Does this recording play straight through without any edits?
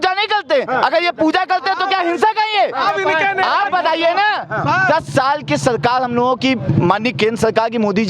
yes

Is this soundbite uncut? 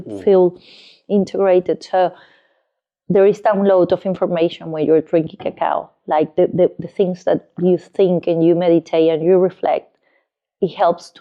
yes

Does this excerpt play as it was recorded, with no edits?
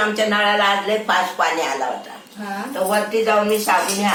yes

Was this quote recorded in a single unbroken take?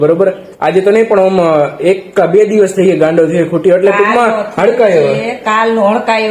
yes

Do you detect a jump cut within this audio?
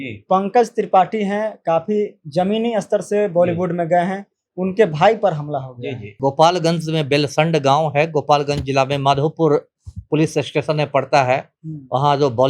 yes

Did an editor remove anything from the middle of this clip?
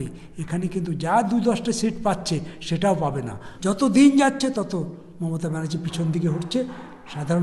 yes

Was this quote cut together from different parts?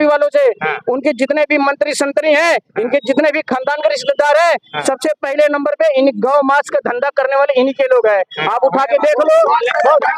no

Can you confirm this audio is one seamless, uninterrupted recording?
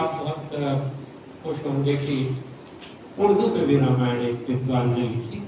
yes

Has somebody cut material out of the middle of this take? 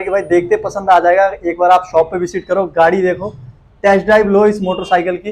no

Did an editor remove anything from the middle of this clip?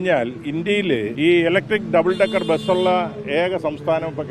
yes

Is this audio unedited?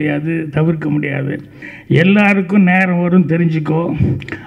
no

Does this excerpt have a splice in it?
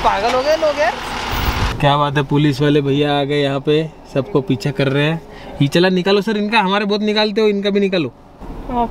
no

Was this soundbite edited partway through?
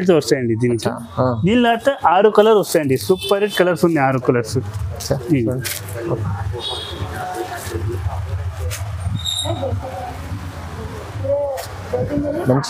no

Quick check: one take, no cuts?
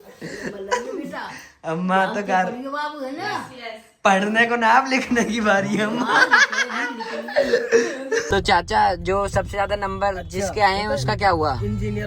no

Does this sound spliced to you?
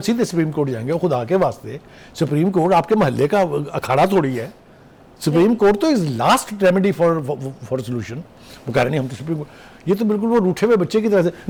no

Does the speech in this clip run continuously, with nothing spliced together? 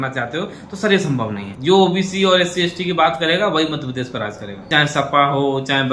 no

